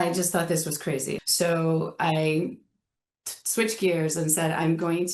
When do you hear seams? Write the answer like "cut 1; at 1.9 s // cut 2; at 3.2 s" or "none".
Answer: cut 1; at 1.1 s